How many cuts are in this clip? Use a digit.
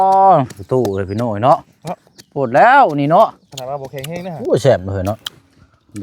1